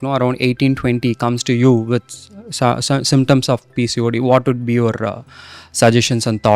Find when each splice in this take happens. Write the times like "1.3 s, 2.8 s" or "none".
none